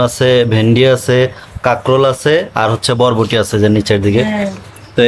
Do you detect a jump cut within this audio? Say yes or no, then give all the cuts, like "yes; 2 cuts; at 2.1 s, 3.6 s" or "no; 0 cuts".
no; 0 cuts